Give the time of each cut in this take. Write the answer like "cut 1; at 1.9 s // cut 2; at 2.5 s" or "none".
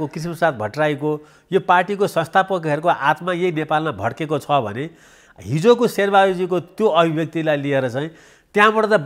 none